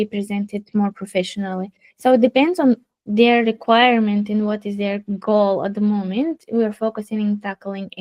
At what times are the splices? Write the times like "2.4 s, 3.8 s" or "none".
none